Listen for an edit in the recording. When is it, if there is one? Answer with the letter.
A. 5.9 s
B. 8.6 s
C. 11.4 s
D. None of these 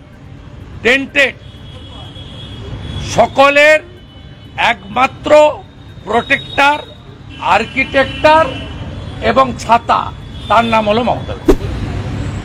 C